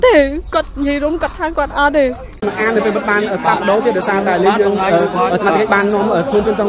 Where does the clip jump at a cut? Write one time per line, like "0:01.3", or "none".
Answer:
0:02.4

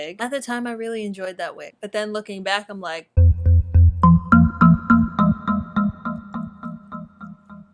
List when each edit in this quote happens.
0:01.7

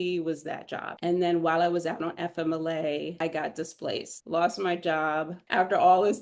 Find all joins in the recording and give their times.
0:01.0
0:03.1
0:04.2
0:05.3

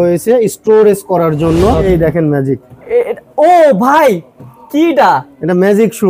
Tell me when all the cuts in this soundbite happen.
0:01.9

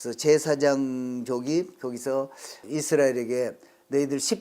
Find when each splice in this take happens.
0:02.6

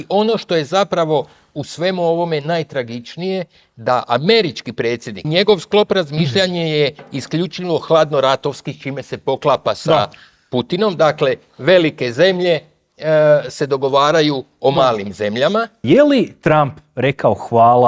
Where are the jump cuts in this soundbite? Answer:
0:05.2
0:15.8

